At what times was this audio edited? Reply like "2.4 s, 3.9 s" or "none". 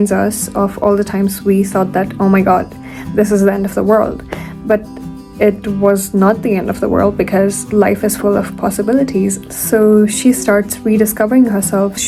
none